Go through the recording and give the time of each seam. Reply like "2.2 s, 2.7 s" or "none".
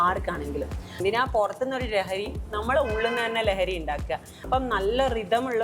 1.0 s, 4.5 s

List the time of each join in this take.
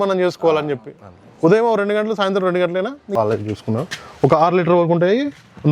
3.1 s

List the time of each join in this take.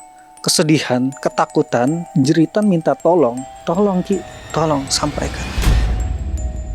2.0 s, 3.5 s, 5.4 s

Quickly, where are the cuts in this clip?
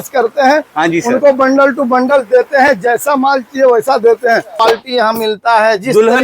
4.5 s

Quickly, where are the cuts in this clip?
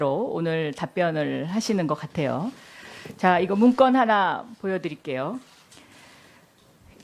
4.8 s

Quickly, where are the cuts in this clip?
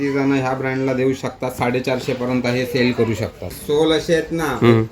3.5 s

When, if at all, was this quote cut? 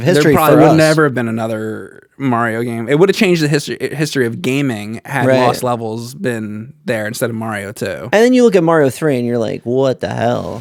none

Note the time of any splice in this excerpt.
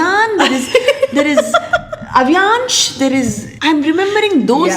3.5 s

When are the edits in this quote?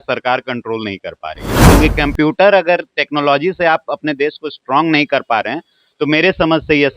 1.7 s

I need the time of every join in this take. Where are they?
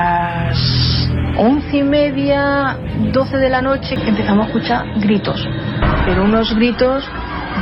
3.9 s

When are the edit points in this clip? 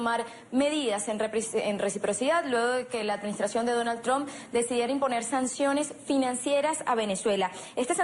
6.6 s

